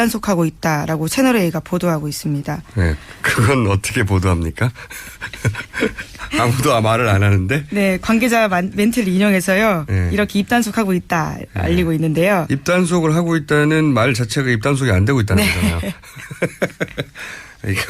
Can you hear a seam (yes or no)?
yes